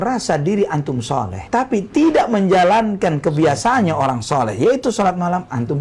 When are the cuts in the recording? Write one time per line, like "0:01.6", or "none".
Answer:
none